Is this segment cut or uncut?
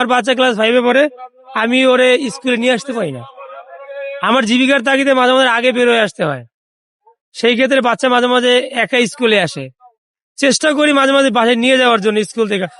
uncut